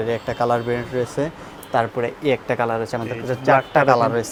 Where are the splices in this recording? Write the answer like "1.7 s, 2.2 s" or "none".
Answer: none